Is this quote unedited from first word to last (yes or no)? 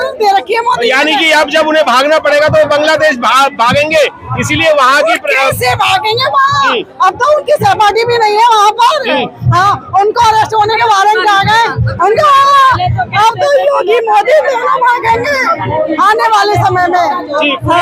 yes